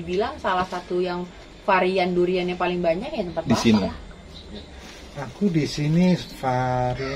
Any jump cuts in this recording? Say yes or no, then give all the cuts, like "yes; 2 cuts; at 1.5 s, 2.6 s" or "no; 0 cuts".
no; 0 cuts